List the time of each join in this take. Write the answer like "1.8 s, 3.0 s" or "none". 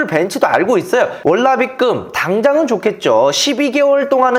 1.2 s